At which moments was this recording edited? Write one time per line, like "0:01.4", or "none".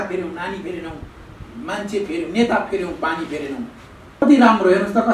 0:04.2